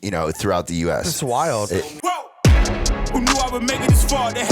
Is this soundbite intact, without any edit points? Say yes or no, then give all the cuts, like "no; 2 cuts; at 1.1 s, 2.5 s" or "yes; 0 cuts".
no; 1 cut; at 1.7 s